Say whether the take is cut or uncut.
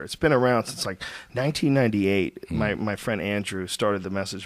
cut